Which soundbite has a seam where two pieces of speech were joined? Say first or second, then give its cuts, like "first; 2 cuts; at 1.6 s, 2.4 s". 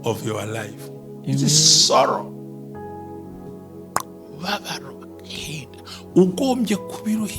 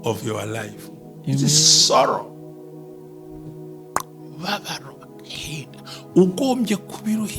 first; 2 cuts; at 2.2 s, 3.9 s